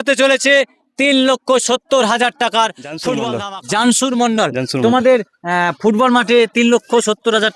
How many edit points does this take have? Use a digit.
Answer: 1